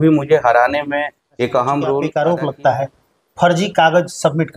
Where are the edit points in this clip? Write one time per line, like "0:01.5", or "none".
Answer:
0:02.1